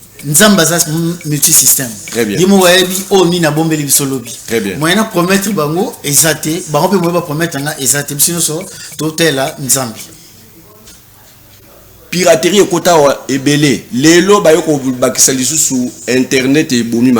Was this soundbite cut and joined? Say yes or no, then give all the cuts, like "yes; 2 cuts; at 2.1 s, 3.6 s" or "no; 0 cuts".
yes; 1 cut; at 10.0 s